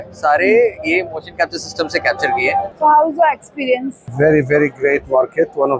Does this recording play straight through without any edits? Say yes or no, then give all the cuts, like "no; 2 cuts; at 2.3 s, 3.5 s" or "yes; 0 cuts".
no; 1 cut; at 2.7 s